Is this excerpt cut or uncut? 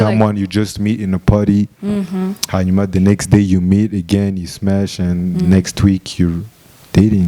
uncut